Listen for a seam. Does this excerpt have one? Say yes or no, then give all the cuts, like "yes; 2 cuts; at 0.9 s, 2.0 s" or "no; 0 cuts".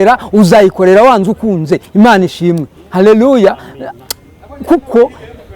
no; 0 cuts